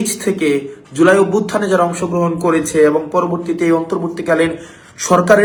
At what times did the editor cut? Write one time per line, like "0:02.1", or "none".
none